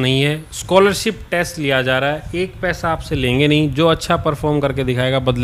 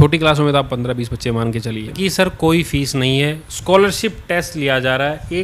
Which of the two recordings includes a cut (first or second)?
second